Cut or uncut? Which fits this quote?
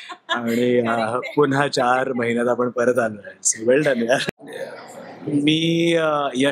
cut